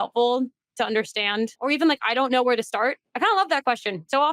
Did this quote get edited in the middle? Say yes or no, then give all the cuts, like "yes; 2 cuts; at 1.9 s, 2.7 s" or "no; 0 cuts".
yes; 2 cuts; at 1.6 s, 3.1 s